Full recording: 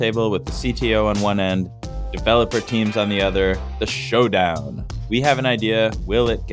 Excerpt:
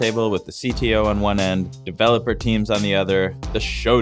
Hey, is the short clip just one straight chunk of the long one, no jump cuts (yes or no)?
no